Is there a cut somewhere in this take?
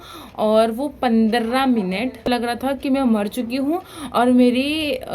yes; 1 cut; at 2.5 s

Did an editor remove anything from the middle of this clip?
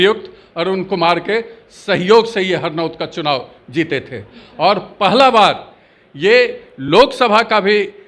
no; 0 cuts

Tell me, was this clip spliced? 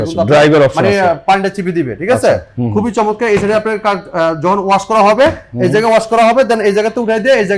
no; 0 cuts

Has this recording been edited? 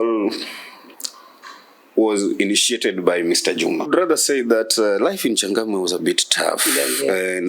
yes; 1 cut; at 3.9 s

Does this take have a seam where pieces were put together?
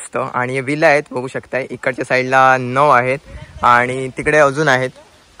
no; 0 cuts

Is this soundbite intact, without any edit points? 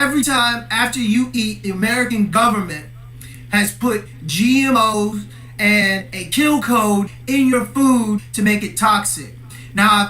no; 1 cut; at 5.1 s

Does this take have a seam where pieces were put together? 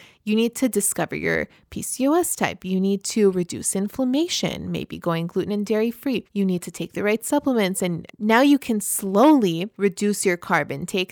yes; 3 cuts; at 6.3 s, 8.1 s, 9.7 s

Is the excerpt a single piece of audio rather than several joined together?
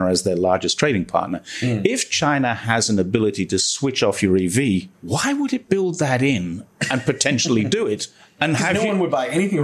yes; 0 cuts

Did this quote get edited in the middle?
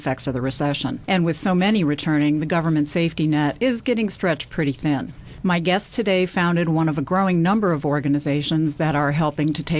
yes; 1 cut; at 6.2 s

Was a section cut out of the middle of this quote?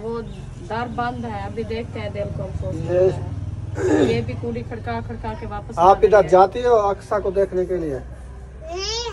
no; 0 cuts

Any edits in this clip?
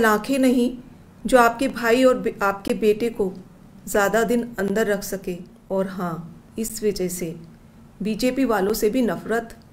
yes; 2 cuts; at 5.5 s, 6.4 s

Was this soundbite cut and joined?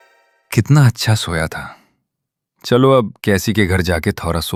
no; 0 cuts

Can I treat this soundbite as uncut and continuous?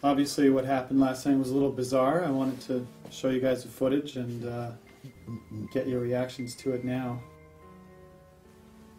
yes; 0 cuts

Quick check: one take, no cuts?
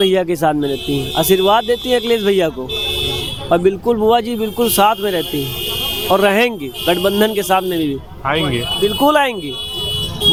yes; 0 cuts

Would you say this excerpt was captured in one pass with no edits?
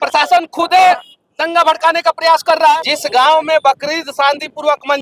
no; 1 cut; at 2.8 s

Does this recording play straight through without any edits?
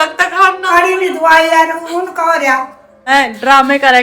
no; 1 cut; at 3.1 s

